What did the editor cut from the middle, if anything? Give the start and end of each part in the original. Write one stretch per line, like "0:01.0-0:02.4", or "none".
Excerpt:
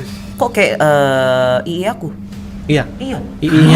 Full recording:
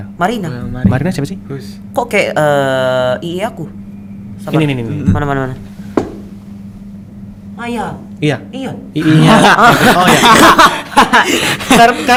0:04.1-0:08.0